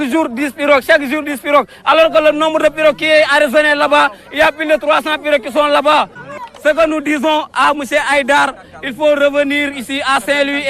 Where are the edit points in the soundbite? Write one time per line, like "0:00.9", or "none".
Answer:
0:06.2